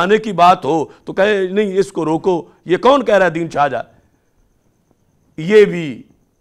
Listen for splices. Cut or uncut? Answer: uncut